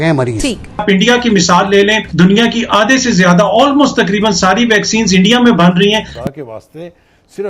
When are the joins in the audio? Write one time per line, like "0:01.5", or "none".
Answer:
0:00.8
0:02.0
0:06.0